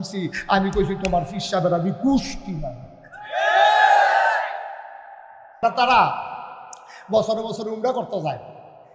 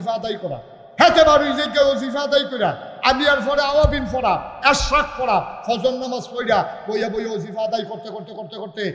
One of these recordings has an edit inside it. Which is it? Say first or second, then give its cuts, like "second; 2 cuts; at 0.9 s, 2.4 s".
first; 1 cut; at 5.6 s